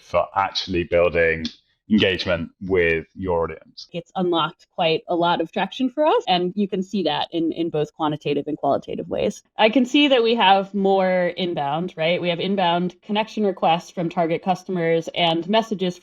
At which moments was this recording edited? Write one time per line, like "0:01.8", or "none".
0:04.0
0:06.2
0:09.4